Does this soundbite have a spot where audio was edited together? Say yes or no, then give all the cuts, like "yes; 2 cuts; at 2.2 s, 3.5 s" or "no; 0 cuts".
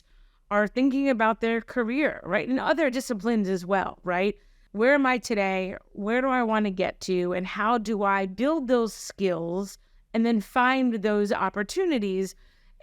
yes; 1 cut; at 4.6 s